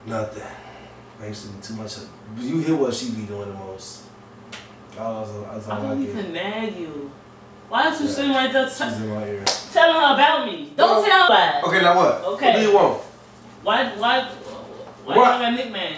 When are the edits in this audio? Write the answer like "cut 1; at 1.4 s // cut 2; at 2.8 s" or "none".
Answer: cut 1; at 11.3 s

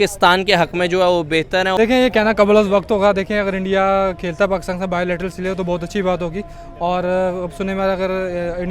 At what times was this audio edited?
cut 1; at 1.8 s

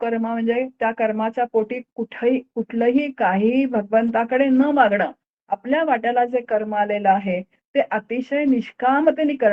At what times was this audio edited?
none

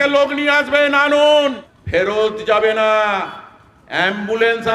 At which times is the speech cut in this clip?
cut 1; at 1.7 s

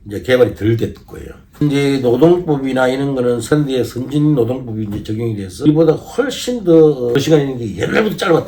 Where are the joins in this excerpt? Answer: cut 1; at 1.6 s // cut 2; at 3.5 s // cut 3; at 5.6 s // cut 4; at 7.2 s

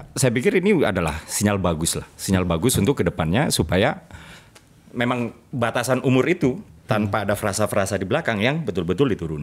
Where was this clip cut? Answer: none

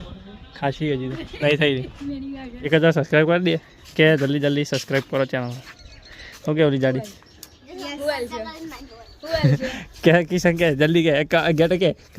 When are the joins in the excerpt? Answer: cut 1; at 2.7 s

